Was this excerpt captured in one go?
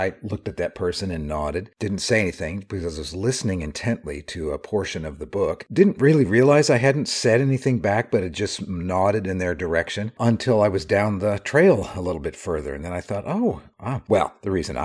yes; 0 cuts

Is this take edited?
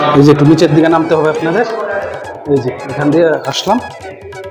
no; 0 cuts

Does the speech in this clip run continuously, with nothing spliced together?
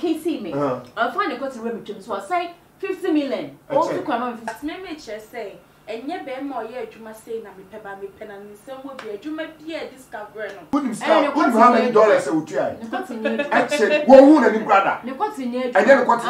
no; 2 cuts; at 4.5 s, 10.5 s

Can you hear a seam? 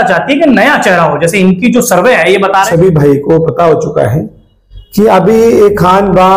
yes; 1 cut; at 2.7 s

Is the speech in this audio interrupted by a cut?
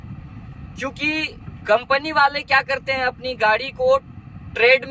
yes; 1 cut; at 1.5 s

